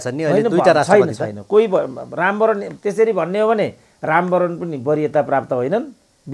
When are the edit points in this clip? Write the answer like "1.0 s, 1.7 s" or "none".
none